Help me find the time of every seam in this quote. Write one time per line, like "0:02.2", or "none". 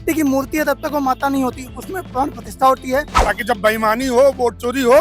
0:03.2